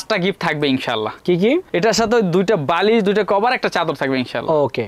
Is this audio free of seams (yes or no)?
yes